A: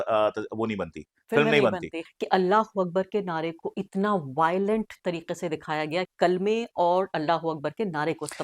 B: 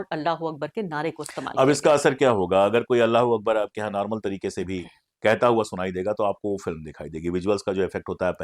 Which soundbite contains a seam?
A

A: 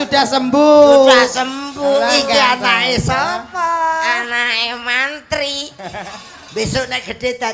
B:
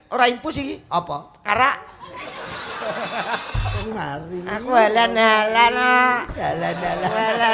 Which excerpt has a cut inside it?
B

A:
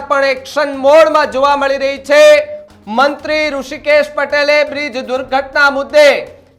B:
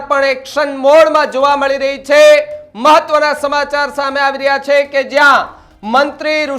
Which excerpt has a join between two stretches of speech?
A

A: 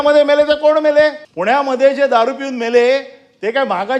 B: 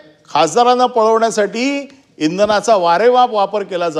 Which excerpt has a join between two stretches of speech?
A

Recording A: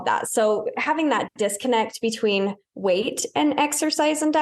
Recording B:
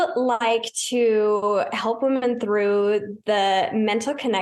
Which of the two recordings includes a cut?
A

